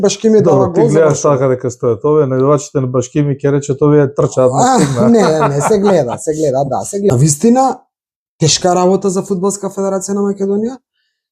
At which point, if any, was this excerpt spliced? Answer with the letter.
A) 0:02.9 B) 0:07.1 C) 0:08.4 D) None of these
B